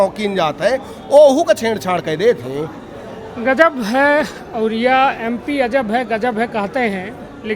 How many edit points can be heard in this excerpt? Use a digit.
0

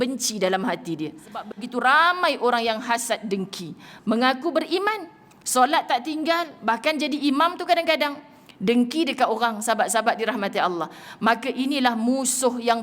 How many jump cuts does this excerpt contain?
1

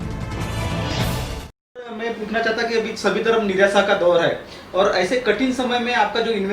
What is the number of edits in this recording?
1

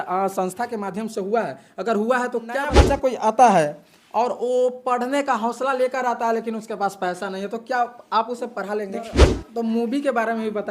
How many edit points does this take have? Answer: 2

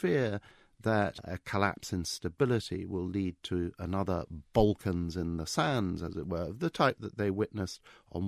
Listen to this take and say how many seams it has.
1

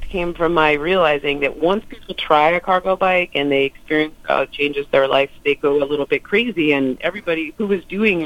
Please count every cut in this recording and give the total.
1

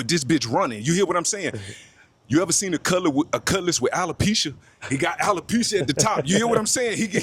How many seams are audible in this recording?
0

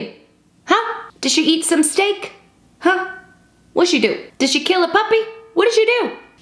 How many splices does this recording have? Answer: 0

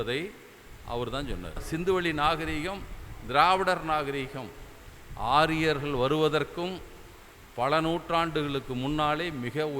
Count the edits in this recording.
1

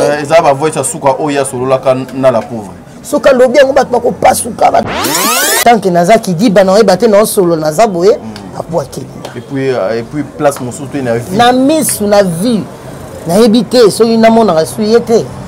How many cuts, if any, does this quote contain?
1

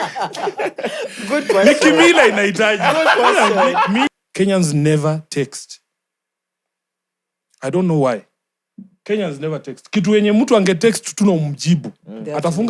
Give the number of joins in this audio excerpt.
1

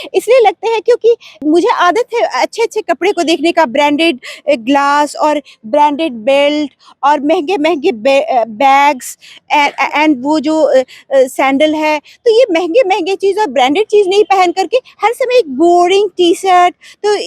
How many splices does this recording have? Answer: 1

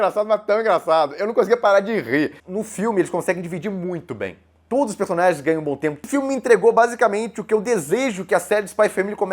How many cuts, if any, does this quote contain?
2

